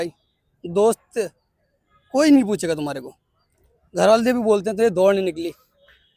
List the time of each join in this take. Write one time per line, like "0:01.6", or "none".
none